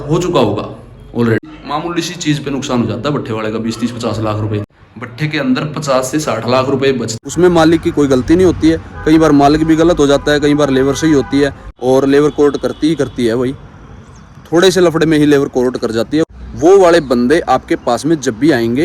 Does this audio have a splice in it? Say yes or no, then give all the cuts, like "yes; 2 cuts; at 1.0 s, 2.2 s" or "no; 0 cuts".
yes; 5 cuts; at 1.6 s, 4.7 s, 7.1 s, 11.6 s, 16.2 s